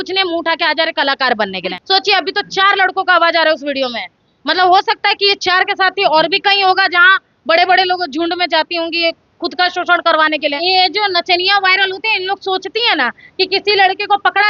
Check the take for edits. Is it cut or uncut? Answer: cut